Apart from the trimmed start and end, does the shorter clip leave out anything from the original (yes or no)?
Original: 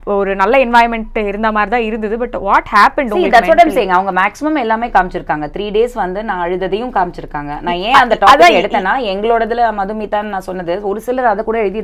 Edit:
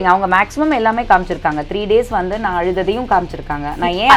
no